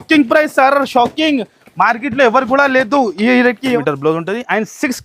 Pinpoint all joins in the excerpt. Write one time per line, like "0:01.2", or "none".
0:03.8